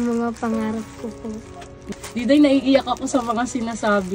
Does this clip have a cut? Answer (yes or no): yes